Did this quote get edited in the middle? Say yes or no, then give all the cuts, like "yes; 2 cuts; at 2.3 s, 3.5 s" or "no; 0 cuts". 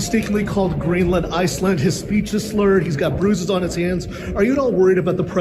no; 0 cuts